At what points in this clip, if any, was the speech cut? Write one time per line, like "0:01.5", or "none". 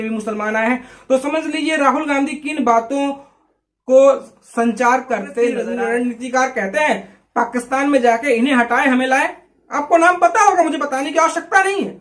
0:05.6